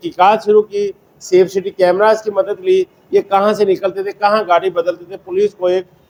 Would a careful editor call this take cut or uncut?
uncut